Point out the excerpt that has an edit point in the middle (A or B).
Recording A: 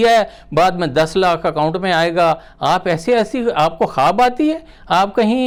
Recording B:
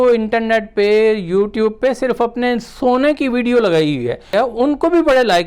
B